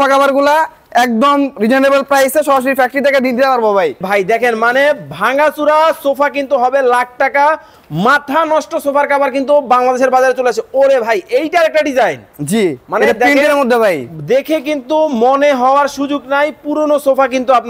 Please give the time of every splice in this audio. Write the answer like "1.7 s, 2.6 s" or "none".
4.0 s